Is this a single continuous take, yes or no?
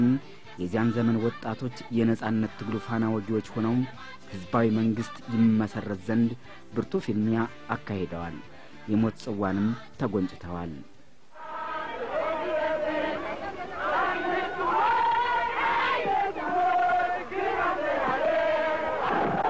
yes